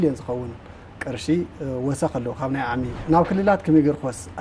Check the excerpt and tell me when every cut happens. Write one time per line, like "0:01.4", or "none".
0:03.0